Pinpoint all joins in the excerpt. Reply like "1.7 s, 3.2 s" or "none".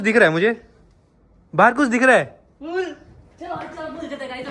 none